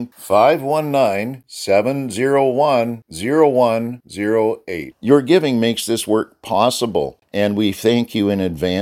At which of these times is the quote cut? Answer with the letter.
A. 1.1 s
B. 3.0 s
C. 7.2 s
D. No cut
C